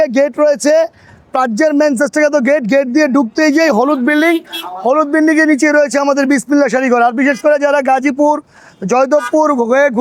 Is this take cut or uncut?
uncut